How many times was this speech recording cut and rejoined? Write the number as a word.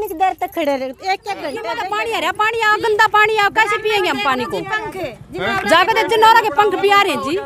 one